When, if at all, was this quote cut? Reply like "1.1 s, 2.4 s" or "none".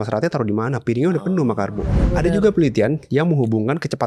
2.1 s